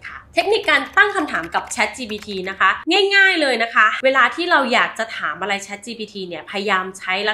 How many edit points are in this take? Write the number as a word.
one